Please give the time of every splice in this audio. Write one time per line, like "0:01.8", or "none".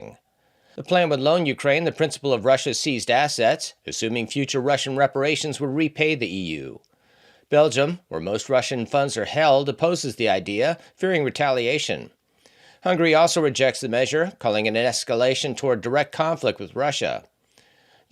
none